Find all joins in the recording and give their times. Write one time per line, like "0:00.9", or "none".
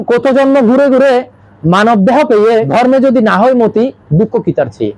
0:02.7

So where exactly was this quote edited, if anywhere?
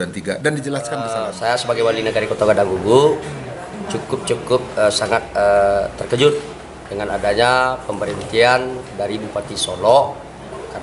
0:01.3

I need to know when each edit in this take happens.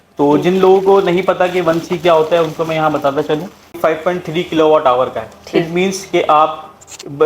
0:03.8

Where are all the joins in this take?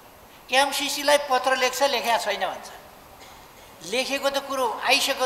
none

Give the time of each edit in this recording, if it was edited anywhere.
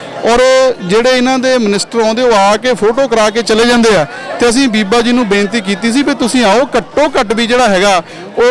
none

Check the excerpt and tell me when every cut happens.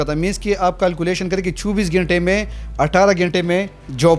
none

